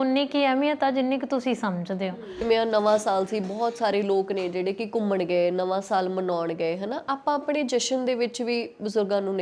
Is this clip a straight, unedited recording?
no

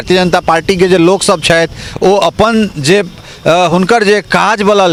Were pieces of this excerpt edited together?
no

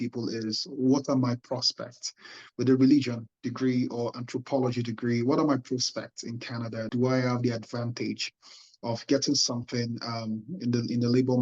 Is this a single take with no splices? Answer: yes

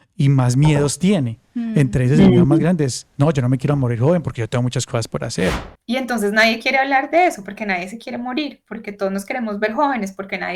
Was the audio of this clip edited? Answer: yes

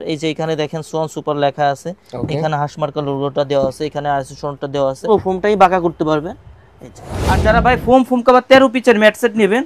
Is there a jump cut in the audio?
yes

